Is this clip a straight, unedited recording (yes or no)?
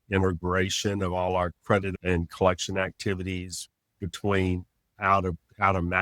yes